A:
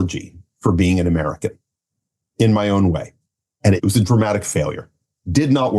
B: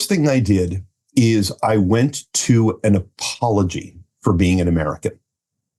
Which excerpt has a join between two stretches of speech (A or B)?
A